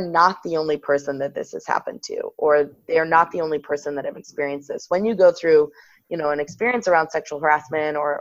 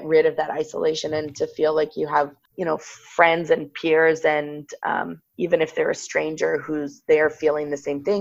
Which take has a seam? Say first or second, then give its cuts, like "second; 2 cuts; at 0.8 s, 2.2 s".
second; 1 cut; at 2.4 s